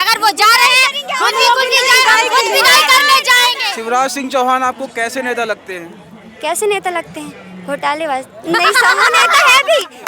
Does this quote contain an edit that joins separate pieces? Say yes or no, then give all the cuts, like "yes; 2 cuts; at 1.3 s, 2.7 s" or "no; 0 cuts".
yes; 1 cut; at 3.7 s